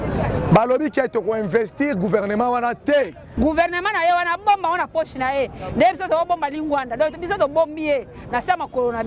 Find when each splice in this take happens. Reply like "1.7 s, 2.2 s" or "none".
3.2 s